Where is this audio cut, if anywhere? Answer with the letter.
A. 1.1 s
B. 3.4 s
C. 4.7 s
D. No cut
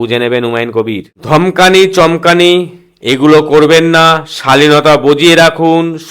A